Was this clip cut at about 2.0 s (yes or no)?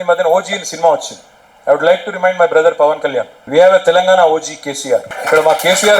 no